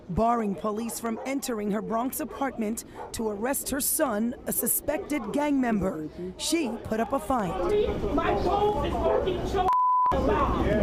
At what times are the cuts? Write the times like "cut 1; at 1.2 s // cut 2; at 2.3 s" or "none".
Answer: none

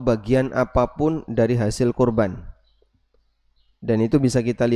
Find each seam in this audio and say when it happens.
none

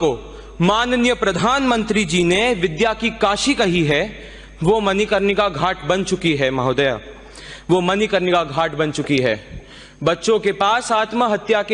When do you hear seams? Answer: none

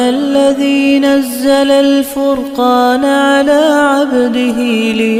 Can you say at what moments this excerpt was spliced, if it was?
none

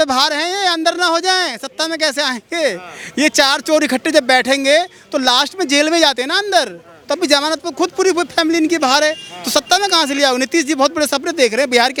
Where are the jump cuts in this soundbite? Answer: none

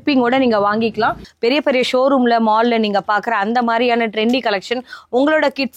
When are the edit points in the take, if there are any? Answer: cut 1; at 1.2 s

